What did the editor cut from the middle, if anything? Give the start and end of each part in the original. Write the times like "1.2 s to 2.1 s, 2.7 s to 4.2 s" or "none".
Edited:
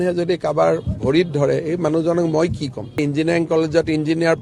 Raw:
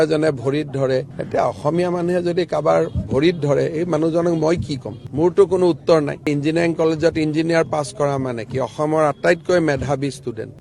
5.0 s to 6.2 s